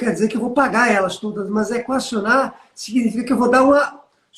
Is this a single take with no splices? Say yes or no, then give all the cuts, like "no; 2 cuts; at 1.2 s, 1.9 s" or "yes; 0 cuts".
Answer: yes; 0 cuts